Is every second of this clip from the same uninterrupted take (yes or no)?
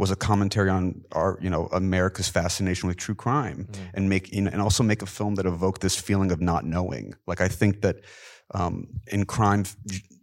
yes